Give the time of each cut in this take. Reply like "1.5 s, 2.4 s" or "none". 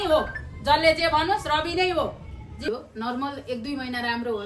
2.7 s